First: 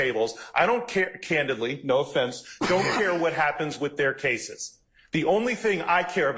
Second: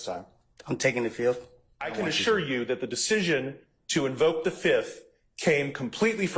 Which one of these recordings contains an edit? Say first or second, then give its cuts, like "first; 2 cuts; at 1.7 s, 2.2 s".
second; 1 cut; at 1.9 s